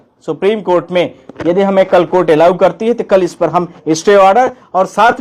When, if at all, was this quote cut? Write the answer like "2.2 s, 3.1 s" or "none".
none